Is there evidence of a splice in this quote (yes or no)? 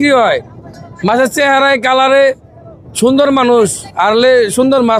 no